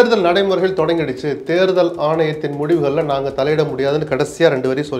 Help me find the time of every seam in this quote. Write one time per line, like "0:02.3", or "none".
none